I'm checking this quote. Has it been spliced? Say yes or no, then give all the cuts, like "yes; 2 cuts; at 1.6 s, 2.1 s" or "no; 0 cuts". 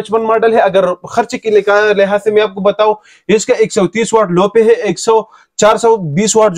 no; 0 cuts